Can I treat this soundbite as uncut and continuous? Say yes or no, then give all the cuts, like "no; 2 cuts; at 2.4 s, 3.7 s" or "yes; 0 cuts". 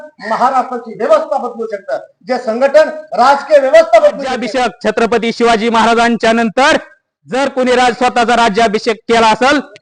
no; 1 cut; at 4.4 s